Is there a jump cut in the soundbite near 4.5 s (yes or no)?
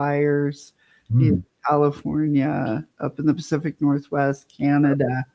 no